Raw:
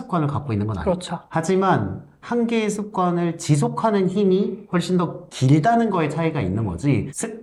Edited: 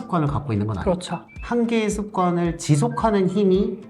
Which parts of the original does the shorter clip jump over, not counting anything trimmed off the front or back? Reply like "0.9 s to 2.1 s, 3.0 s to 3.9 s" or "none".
1.2 s to 2.0 s